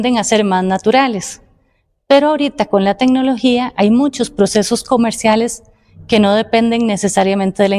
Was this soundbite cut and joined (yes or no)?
no